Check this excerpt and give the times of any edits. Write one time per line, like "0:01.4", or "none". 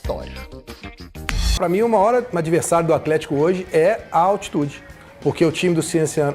0:01.5